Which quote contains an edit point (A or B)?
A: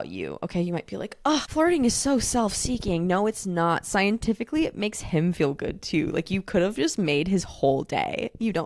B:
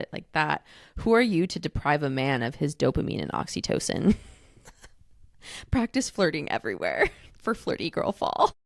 A